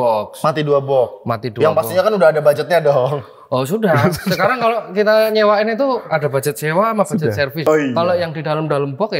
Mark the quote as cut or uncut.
cut